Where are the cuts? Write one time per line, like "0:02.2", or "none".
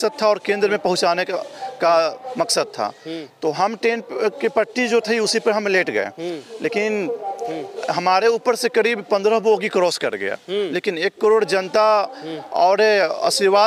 none